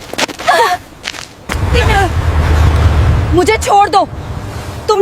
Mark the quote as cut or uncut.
cut